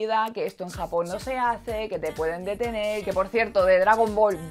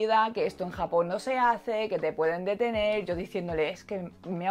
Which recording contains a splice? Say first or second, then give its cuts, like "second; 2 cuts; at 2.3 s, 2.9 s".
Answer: first; 1 cut; at 3.0 s